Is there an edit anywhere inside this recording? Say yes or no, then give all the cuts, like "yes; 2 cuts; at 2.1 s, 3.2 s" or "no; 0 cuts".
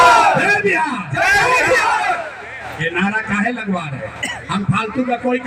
no; 0 cuts